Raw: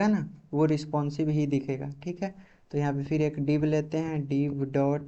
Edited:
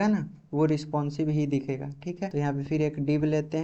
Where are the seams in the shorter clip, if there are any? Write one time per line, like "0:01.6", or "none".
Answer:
0:02.3

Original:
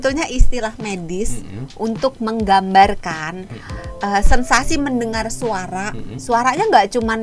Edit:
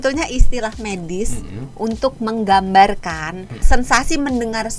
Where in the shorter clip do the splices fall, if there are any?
0:03.7

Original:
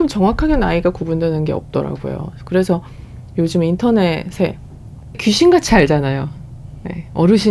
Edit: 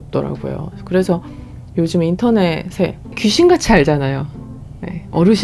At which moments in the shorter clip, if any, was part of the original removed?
0:03.0

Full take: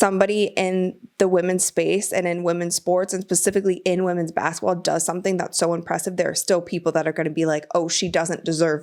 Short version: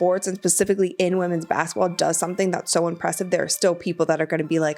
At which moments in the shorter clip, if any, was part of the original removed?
none

